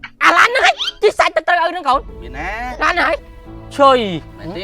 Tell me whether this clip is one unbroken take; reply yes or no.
no